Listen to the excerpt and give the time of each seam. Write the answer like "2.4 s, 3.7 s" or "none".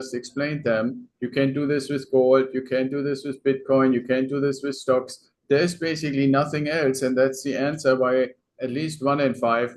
none